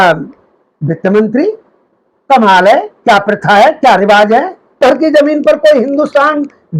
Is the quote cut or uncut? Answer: cut